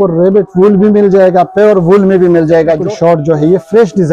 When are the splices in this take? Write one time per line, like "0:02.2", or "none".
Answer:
0:02.9